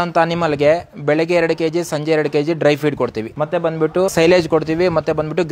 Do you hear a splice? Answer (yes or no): yes